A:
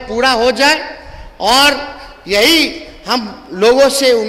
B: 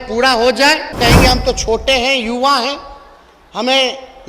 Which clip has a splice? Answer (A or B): B